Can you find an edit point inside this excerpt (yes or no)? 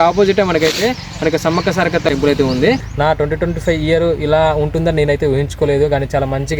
yes